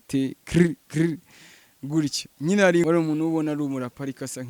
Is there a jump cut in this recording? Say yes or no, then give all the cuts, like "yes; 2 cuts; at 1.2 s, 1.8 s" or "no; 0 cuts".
yes; 1 cut; at 2.8 s